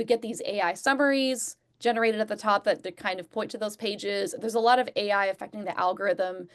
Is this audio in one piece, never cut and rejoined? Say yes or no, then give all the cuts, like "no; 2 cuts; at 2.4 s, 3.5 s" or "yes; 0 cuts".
yes; 0 cuts